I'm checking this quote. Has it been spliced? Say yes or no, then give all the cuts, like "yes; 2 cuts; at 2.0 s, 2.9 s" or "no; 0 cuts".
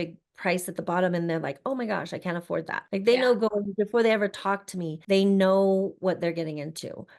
yes; 2 cuts; at 2.8 s, 5.0 s